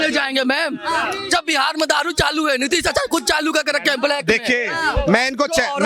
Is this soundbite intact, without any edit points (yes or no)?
yes